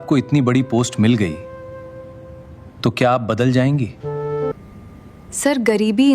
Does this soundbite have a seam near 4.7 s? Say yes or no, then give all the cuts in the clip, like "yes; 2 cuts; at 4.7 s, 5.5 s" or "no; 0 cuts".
yes; 1 cut; at 4.7 s